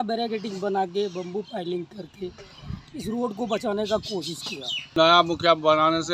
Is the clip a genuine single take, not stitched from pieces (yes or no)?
no